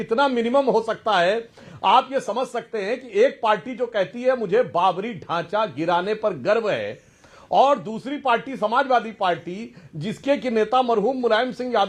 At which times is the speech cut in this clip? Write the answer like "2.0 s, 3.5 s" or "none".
none